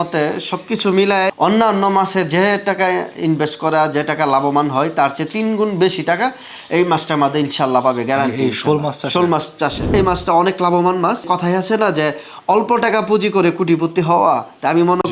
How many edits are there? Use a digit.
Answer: 3